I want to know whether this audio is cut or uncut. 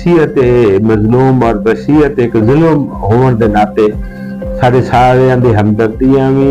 uncut